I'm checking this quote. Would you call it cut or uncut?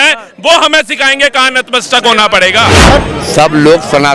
cut